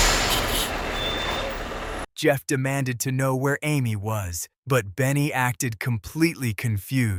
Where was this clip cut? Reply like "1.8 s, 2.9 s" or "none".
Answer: none